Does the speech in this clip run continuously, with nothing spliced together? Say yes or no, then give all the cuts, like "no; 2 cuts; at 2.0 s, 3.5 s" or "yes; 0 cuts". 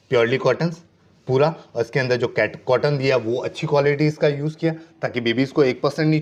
yes; 0 cuts